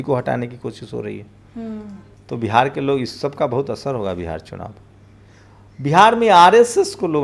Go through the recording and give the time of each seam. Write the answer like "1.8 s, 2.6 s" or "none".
none